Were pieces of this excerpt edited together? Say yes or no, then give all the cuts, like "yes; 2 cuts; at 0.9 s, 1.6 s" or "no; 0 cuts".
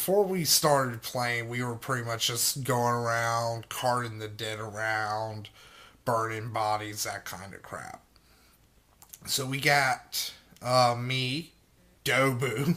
yes; 1 cut; at 2.5 s